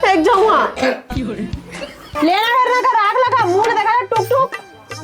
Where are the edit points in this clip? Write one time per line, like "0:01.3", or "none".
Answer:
0:02.1